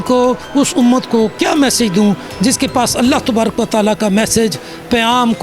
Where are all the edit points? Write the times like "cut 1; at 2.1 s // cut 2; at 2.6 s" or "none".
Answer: none